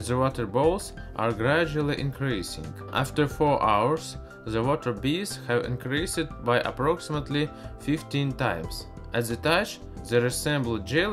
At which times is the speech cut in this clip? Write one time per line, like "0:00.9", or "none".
0:01.0